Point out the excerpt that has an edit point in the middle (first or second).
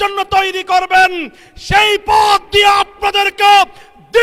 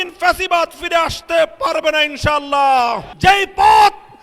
second